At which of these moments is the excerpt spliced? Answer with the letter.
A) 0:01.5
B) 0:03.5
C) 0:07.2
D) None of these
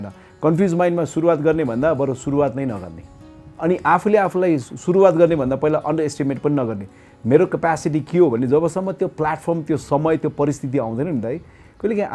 B